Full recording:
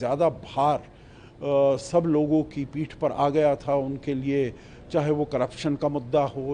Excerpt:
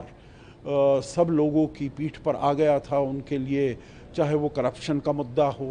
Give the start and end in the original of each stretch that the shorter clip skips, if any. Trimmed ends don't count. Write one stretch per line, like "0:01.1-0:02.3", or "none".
none